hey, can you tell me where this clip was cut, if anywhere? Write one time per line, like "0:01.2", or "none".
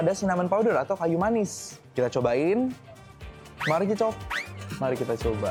none